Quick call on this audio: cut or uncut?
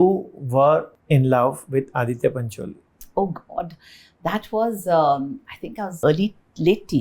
cut